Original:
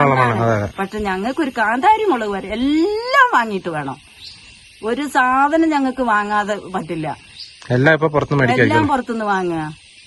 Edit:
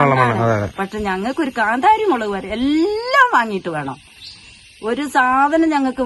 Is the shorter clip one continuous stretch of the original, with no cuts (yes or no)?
yes